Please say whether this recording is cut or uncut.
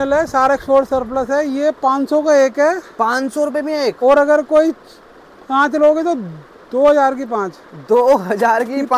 uncut